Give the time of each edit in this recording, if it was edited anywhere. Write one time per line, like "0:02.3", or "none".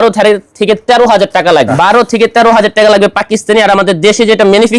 0:01.7